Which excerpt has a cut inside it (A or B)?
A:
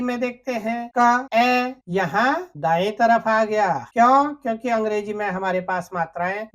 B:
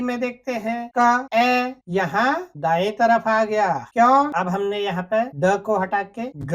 B